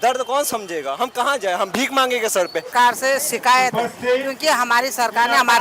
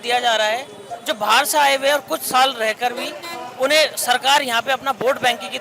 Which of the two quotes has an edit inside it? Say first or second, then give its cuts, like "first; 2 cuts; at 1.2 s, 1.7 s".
first; 1 cut; at 2.7 s